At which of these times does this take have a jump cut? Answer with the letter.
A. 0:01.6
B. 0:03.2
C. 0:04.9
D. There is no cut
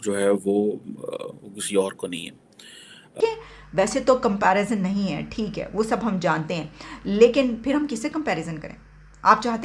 B